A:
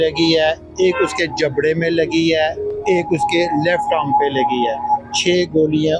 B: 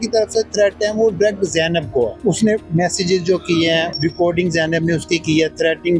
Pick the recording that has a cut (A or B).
B